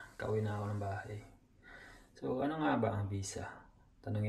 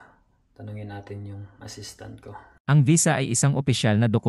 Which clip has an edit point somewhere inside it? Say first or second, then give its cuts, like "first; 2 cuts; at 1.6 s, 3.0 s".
second; 1 cut; at 2.5 s